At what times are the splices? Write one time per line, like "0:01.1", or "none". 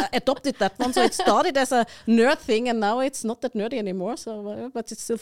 none